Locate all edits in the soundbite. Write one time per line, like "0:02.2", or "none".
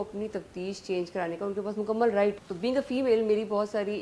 0:02.5